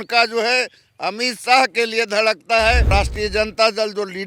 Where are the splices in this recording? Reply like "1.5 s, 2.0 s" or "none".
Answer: 2.9 s